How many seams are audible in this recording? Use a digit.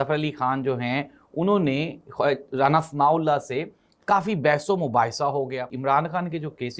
1